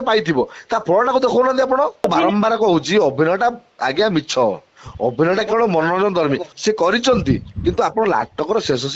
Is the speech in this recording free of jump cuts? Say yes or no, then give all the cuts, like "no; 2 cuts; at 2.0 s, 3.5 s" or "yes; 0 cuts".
no; 2 cuts; at 2.0 s, 6.5 s